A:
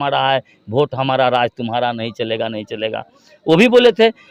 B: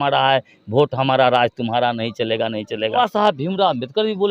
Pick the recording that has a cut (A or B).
B